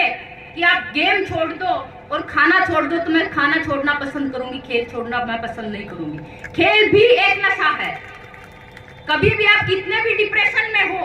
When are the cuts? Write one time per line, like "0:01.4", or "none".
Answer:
none